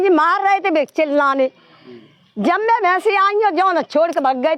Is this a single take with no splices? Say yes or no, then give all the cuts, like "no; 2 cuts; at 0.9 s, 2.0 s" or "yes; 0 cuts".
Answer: yes; 0 cuts